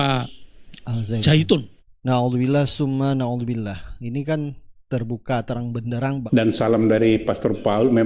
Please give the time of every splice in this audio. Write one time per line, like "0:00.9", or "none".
0:06.2